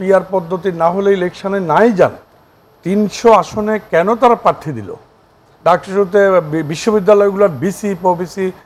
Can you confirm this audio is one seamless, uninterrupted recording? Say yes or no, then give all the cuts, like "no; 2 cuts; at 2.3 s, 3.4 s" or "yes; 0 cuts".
no; 1 cut; at 5.4 s